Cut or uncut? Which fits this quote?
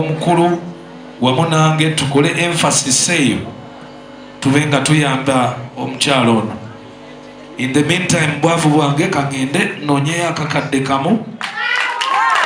uncut